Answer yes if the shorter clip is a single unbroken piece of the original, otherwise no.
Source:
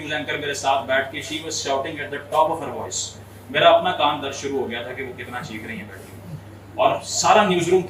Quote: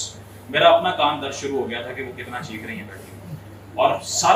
yes